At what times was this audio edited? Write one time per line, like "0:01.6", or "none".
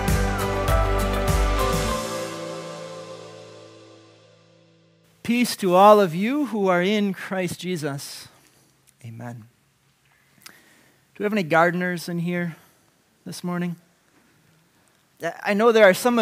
0:05.0